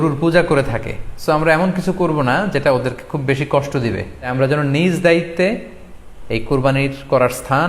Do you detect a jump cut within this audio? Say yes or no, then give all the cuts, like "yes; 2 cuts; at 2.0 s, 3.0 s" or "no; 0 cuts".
yes; 1 cut; at 4.3 s